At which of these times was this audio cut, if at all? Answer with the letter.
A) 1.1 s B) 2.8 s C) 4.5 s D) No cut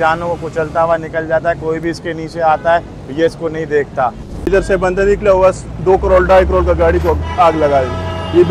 C